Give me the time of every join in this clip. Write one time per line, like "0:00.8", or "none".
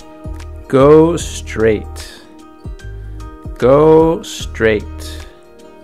0:01.8
0:03.6
0:04.8